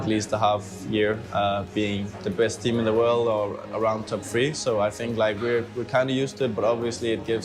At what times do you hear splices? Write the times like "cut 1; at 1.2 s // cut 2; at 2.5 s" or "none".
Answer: cut 1; at 2.2 s